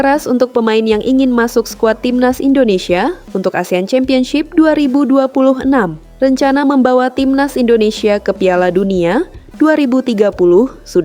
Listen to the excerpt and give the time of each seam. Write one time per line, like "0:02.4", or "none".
0:06.0